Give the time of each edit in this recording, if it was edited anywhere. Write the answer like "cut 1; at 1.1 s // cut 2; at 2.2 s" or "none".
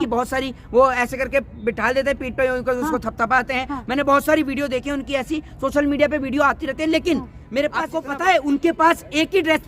cut 1; at 8.0 s